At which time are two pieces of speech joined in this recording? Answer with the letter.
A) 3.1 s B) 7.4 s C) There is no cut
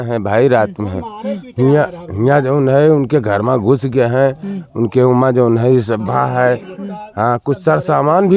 C